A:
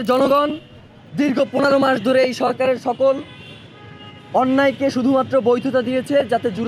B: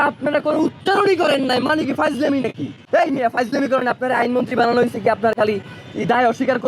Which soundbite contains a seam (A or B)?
B